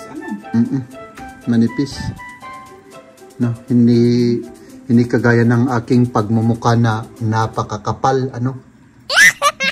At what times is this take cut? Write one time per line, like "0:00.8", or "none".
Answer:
none